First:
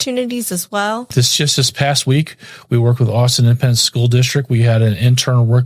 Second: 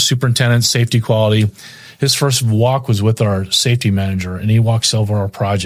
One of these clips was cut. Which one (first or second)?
first